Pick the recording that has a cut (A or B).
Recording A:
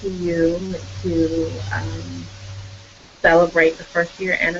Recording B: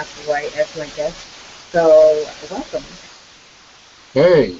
B